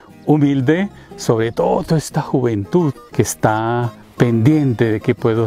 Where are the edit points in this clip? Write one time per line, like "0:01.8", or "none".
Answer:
0:03.0
0:04.0

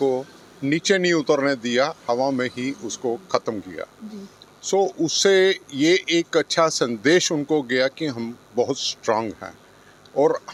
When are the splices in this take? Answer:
none

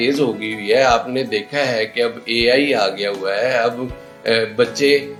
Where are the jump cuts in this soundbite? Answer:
none

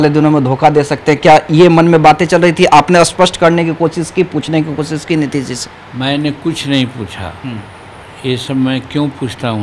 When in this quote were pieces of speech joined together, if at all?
none

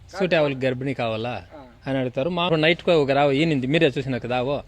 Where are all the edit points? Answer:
0:02.5

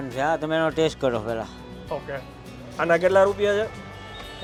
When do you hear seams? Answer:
none

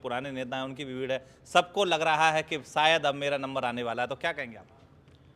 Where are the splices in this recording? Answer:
none

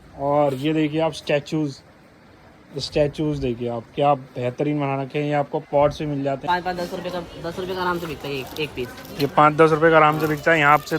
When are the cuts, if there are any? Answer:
0:06.4

